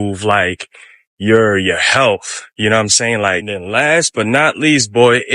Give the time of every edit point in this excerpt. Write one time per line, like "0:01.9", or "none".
0:03.4